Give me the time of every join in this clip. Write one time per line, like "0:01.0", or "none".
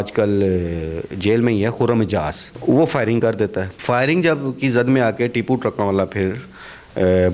0:02.5
0:03.7